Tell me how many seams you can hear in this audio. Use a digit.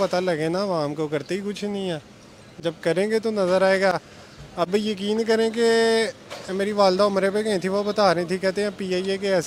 0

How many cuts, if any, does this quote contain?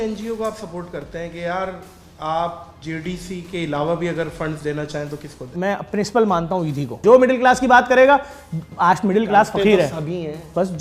3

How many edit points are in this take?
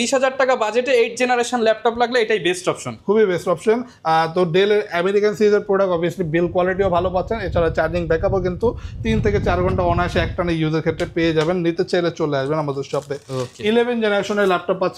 0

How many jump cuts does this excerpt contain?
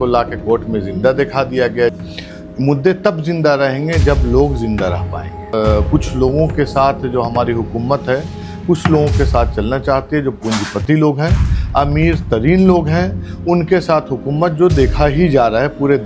2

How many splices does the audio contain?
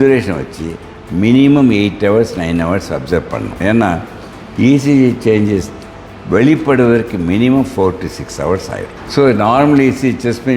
2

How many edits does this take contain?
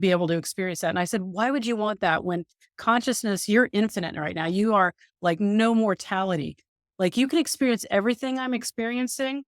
0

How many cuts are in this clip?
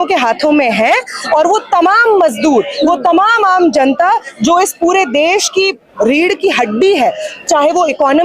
0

